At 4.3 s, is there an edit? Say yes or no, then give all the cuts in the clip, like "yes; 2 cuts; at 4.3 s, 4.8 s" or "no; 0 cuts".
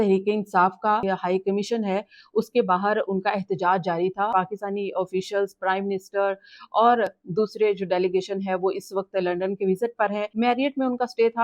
yes; 3 cuts; at 1.0 s, 4.3 s, 10.3 s